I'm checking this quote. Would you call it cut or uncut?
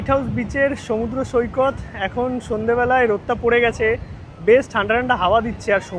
uncut